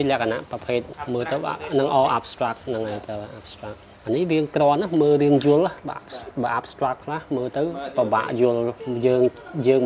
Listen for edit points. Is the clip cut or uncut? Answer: cut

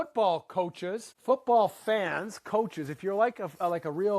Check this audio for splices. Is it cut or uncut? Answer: cut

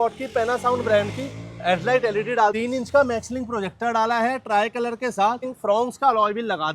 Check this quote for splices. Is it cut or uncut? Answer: cut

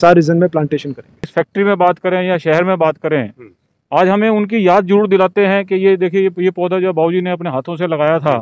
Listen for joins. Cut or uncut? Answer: cut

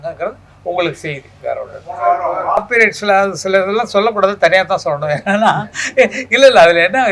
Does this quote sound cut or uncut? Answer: cut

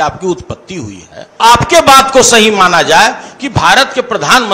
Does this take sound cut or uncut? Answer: cut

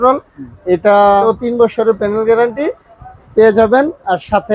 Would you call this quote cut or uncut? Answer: cut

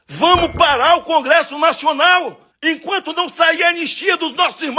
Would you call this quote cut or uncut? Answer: cut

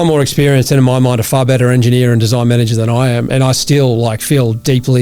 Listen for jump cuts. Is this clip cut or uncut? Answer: cut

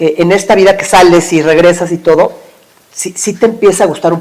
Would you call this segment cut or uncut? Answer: uncut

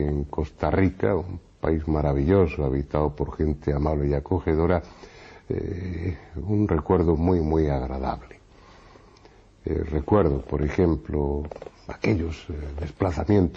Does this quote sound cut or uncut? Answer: cut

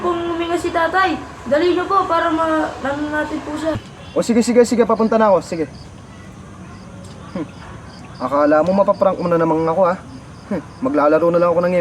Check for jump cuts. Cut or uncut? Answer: uncut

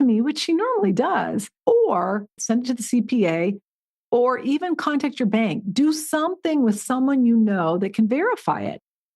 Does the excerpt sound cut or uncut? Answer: cut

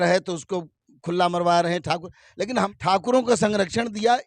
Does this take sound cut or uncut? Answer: cut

